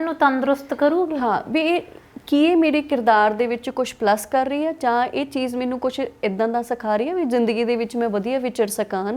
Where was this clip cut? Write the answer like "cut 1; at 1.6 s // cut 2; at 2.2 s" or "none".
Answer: none